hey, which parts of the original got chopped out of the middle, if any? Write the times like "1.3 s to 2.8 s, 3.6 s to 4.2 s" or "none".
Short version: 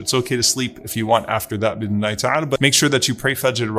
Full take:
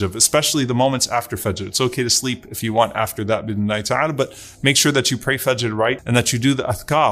4.3 s to 4.6 s